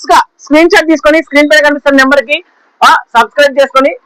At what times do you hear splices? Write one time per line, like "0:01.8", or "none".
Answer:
none